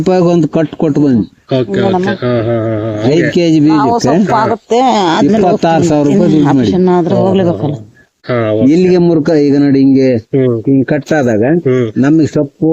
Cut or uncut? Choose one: cut